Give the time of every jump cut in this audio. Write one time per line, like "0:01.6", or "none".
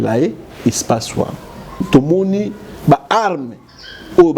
0:01.9